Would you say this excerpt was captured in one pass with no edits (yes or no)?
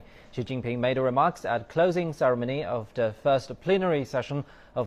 yes